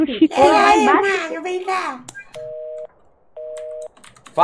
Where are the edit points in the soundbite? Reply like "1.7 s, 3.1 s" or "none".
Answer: none